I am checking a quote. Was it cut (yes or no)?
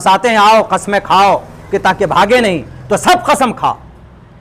no